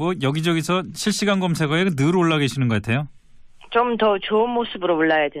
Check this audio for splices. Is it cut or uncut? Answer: cut